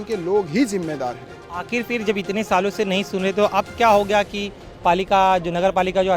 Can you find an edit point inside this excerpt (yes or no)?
no